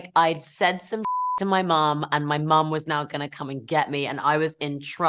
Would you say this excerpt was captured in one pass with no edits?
yes; 0 cuts

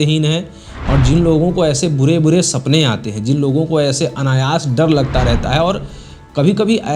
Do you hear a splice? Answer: no; 0 cuts

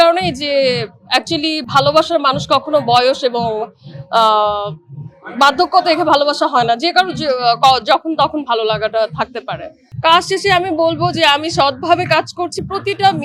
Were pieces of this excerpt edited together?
no; 0 cuts

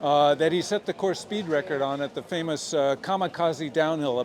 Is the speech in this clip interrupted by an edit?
no; 0 cuts

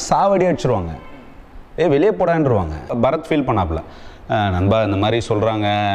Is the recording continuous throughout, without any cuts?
no; 1 cut; at 2.9 s

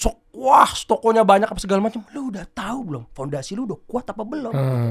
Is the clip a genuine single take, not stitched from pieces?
yes; 0 cuts

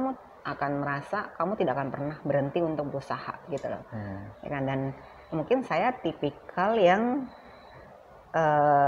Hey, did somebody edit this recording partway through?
no; 0 cuts

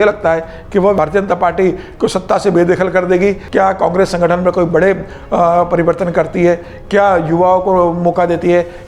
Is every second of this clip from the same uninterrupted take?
no; 2 cuts; at 1.0 s, 3.4 s

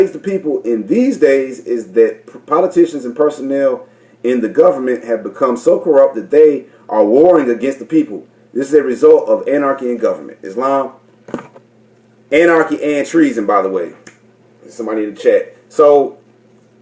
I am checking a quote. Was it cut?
yes; 1 cut; at 1.0 s

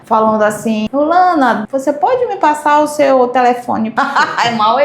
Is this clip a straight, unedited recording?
no; 3 cuts; at 0.9 s, 1.7 s, 3.9 s

